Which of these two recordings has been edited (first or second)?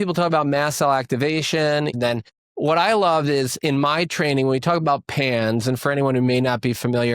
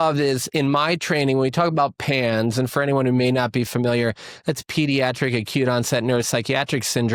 first